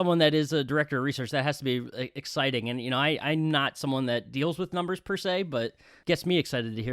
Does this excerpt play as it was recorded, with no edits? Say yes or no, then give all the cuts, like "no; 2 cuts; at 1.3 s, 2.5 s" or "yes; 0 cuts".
no; 1 cut; at 6.0 s